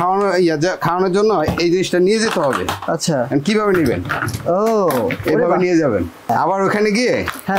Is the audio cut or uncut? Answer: cut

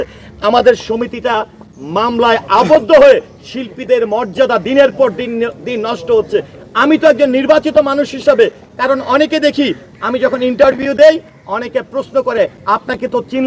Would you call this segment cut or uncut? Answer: uncut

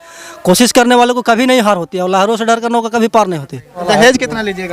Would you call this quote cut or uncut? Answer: cut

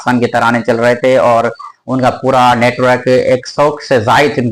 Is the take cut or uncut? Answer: uncut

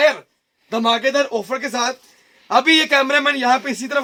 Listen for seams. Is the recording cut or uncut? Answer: uncut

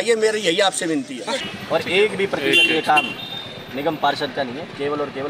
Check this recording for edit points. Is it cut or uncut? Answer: cut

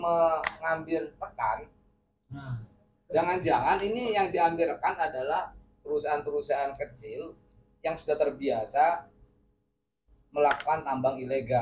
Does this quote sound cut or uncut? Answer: uncut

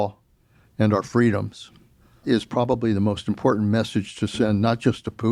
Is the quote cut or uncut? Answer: uncut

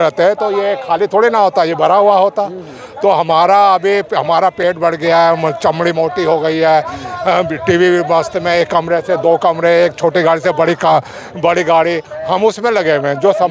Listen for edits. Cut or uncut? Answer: uncut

